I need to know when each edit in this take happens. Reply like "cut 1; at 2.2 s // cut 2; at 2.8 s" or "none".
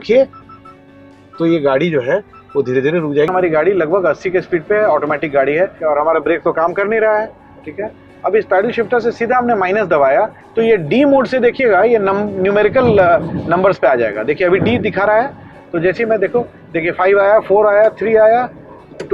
cut 1; at 3.3 s // cut 2; at 5.8 s